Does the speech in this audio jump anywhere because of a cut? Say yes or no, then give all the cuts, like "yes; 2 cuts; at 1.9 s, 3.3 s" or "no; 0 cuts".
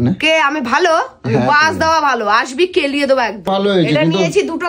yes; 1 cut; at 3.5 s